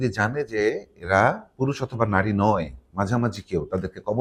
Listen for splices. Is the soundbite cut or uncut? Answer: uncut